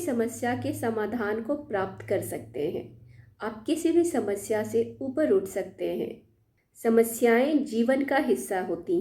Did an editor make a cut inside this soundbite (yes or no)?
yes